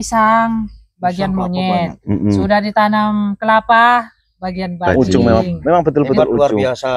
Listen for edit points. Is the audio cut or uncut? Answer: cut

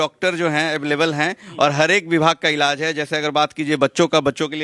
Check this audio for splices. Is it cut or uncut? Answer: uncut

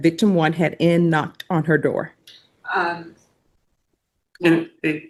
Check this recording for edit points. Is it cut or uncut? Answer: uncut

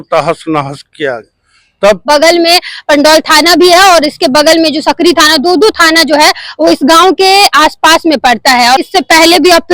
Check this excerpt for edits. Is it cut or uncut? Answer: cut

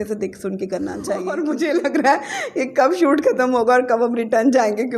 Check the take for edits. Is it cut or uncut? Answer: cut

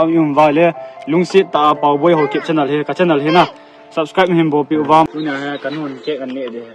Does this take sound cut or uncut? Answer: cut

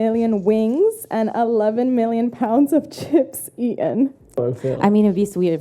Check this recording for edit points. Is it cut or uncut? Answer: cut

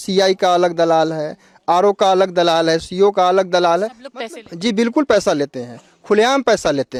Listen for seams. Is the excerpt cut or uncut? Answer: uncut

